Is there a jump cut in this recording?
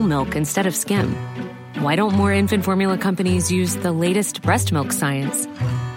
no; 0 cuts

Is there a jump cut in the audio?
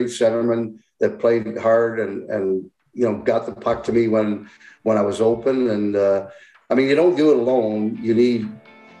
no; 0 cuts

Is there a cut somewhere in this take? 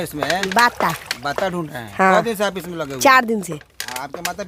no; 0 cuts

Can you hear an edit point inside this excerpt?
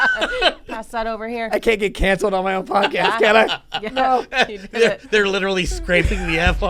no; 0 cuts

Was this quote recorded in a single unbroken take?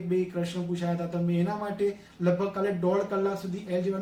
yes; 0 cuts

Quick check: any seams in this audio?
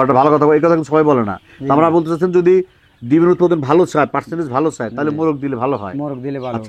no; 0 cuts

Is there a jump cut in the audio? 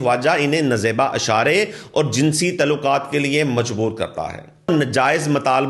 yes; 1 cut; at 4.7 s

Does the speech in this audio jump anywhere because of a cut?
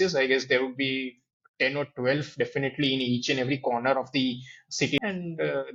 no; 0 cuts

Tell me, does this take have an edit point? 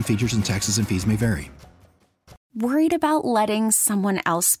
yes; 1 cut; at 2.4 s

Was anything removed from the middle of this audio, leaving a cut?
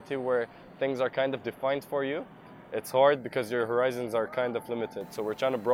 no; 0 cuts

